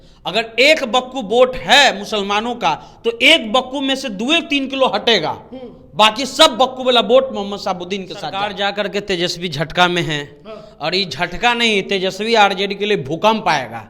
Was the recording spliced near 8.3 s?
yes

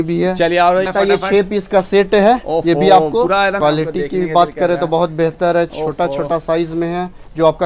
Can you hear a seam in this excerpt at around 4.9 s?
no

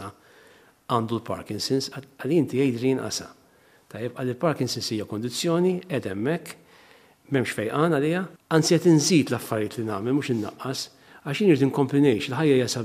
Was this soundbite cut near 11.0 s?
no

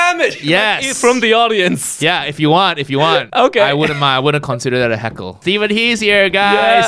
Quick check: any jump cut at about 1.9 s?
no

